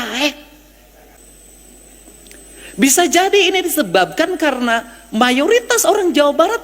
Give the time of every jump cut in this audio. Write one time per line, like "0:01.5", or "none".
0:01.2